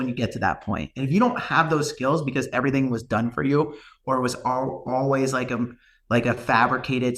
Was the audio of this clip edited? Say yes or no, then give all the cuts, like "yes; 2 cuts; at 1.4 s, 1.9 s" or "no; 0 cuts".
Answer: no; 0 cuts